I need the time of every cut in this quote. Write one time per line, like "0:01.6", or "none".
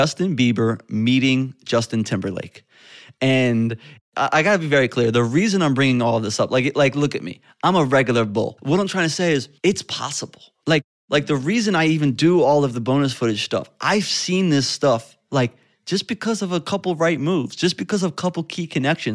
0:04.0
0:08.5
0:09.5